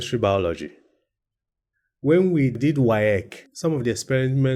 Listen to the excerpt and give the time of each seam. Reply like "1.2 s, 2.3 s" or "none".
2.6 s, 3.4 s